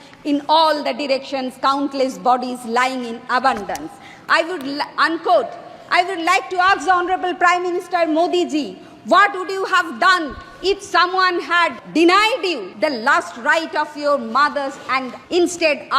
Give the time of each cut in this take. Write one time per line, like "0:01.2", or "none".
0:11.8
0:12.7
0:15.2